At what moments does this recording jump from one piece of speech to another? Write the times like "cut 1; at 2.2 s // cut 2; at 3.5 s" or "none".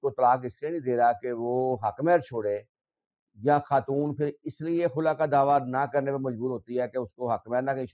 none